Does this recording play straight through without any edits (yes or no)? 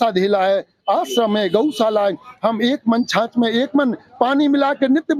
yes